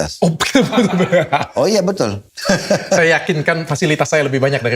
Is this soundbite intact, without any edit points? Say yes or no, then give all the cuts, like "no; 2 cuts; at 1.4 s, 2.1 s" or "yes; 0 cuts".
no; 1 cut; at 2.3 s